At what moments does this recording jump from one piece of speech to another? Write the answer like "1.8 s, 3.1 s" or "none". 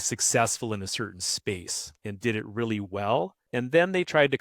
1.8 s, 3.4 s